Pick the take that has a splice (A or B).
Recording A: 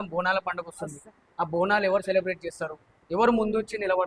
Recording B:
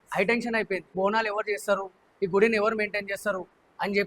B